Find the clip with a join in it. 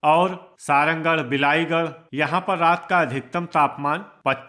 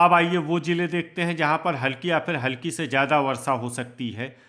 first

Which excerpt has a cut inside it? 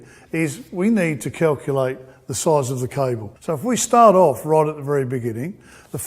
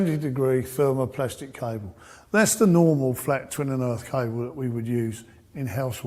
first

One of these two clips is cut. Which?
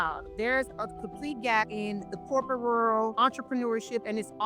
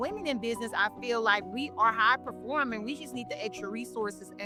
first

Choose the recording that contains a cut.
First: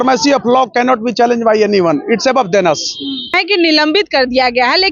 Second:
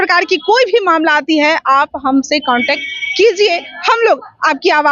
first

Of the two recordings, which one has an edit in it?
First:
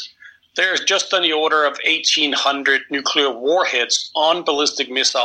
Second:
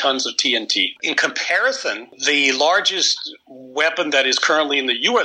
second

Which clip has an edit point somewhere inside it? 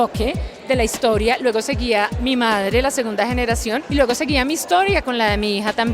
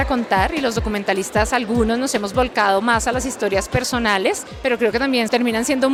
first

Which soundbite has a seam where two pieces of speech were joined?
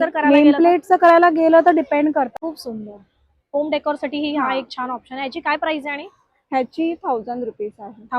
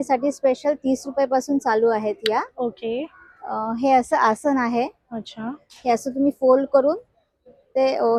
first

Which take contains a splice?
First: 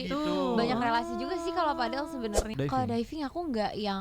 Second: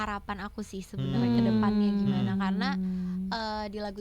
first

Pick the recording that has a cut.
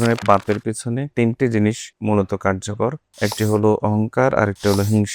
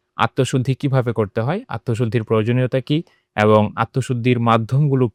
first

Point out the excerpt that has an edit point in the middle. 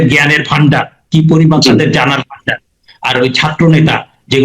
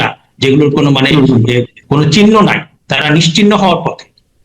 second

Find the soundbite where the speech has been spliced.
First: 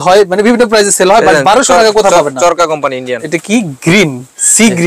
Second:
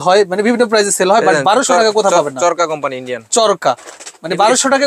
first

